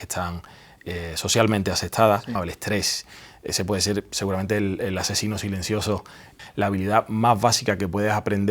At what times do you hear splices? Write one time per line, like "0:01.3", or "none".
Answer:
0:02.5
0:06.3